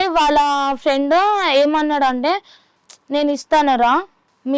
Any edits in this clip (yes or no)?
no